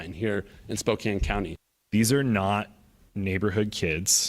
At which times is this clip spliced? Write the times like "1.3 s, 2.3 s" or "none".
1.7 s